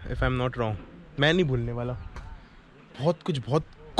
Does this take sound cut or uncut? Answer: uncut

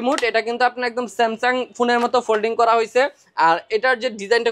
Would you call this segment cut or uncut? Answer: uncut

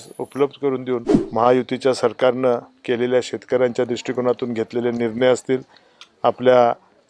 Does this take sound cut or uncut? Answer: cut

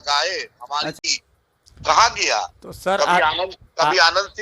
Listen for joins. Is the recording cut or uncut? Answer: cut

